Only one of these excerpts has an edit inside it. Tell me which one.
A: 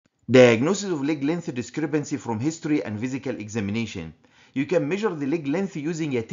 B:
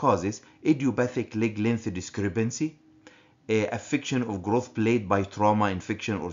B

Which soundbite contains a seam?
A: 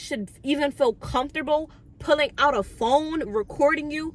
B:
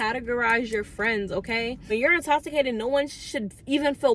B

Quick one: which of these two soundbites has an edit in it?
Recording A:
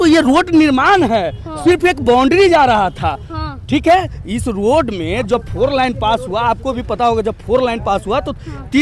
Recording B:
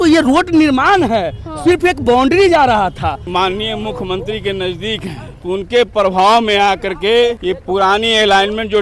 B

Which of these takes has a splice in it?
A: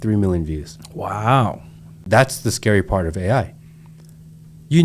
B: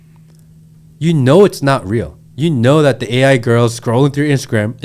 A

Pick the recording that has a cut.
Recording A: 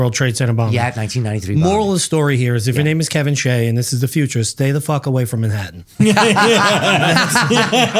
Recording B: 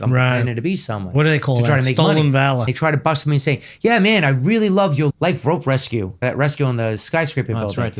B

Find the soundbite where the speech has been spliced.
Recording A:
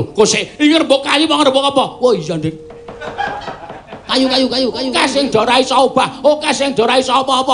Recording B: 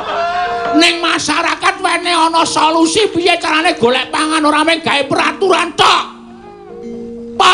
A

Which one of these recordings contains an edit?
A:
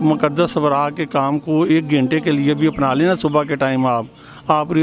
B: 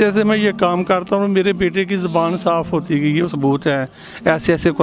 B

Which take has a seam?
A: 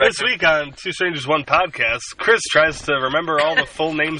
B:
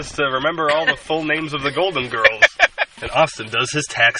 B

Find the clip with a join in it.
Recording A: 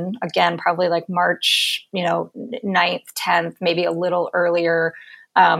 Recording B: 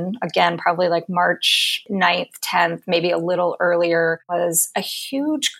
B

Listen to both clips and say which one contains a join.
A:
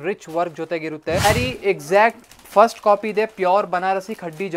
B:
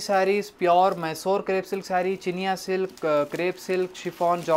A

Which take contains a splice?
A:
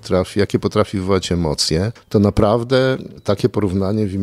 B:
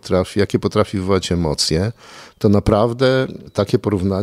A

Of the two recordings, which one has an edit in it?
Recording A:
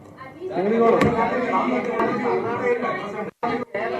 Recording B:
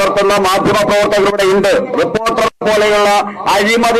A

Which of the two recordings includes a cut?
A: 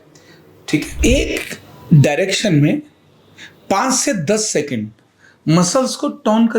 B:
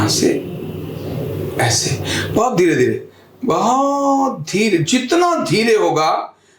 A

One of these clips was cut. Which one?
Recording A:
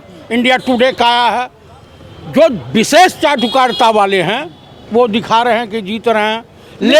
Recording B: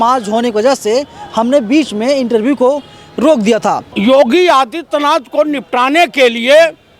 B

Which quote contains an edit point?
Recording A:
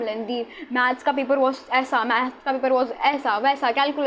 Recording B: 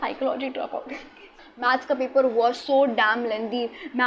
B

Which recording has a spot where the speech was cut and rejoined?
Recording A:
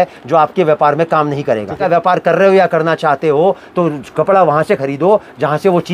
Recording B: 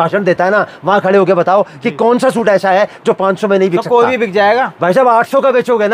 A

